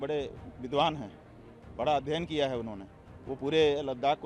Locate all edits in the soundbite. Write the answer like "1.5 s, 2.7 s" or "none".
none